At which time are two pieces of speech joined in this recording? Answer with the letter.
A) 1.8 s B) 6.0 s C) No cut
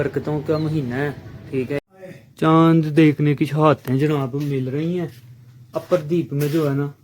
A